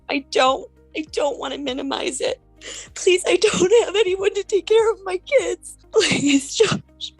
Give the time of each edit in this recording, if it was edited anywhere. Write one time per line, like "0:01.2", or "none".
0:02.5
0:05.7

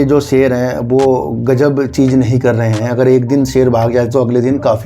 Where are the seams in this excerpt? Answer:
none

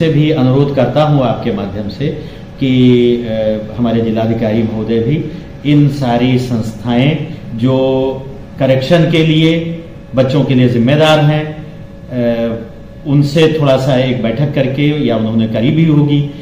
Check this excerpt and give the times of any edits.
none

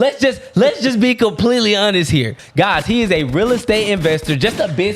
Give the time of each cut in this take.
0:02.4

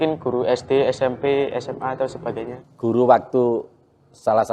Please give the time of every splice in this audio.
0:02.6

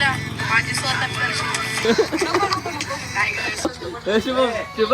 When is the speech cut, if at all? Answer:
0:01.9
0:03.6

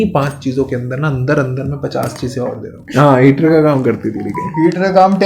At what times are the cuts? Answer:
0:02.8

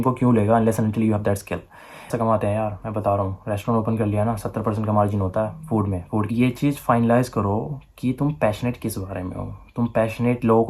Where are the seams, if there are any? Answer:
0:02.1
0:06.3

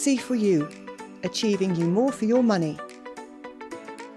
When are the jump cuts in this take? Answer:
0:02.8

